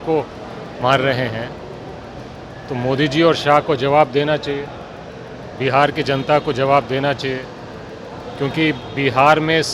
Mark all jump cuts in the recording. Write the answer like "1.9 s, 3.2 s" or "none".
none